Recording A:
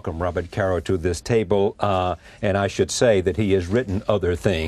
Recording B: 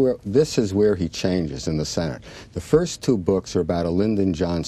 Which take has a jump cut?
B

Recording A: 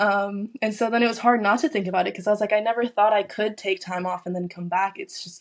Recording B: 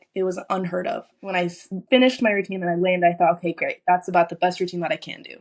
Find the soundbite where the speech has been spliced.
B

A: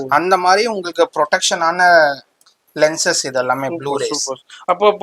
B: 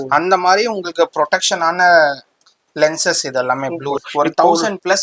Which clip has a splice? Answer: B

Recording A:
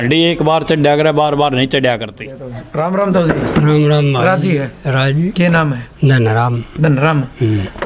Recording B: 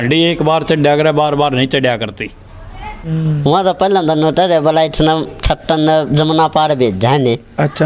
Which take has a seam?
B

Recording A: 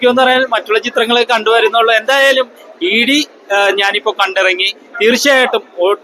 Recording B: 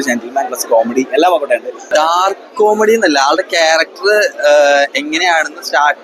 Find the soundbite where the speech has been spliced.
B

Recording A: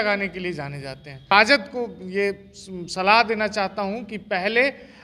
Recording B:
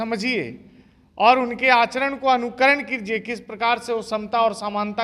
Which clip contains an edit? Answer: A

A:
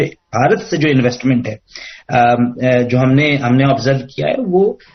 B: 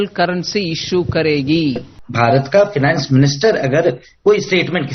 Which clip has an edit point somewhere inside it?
B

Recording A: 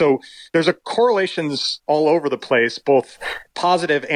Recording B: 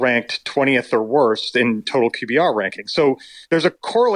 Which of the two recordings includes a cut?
B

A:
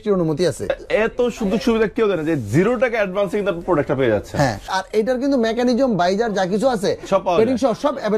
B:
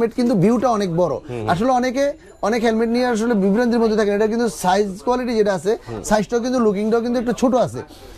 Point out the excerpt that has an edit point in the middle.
A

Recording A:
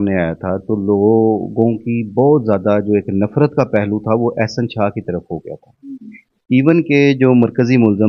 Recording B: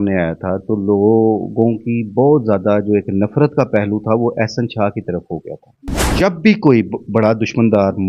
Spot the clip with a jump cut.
B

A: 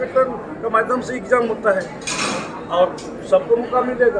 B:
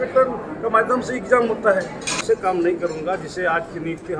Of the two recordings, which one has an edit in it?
B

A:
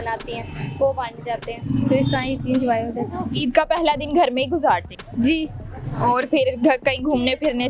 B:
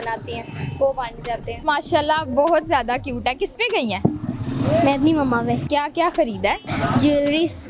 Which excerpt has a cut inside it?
B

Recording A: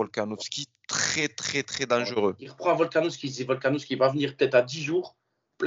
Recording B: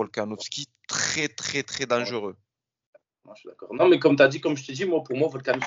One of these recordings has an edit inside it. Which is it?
A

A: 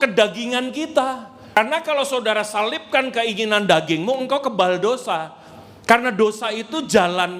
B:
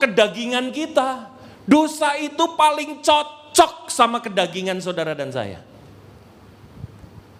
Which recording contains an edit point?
A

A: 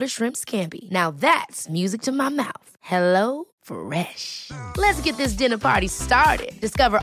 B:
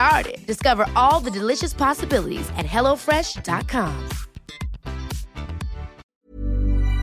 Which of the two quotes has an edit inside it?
B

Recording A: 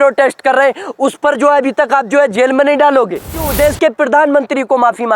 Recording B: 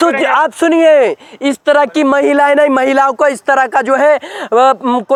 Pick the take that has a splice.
A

